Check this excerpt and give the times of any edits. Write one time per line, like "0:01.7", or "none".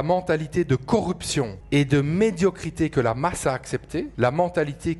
0:01.6
0:04.1